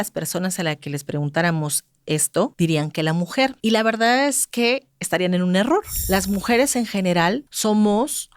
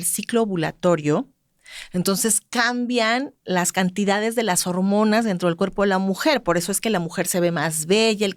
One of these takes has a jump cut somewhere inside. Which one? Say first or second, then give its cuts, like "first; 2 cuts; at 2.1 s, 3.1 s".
first; 4 cuts; at 2.5 s, 3.6 s, 5.9 s, 7.5 s